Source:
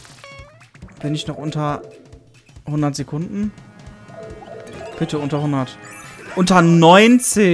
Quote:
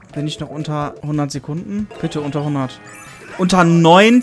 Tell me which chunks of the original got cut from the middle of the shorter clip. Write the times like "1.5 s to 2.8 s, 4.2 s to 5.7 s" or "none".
1.9 s to 2.6 s, 3.6 s to 4.9 s